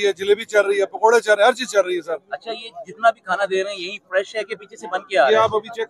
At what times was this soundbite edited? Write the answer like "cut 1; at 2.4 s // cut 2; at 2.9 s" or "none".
none